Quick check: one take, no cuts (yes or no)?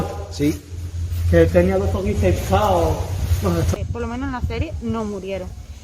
no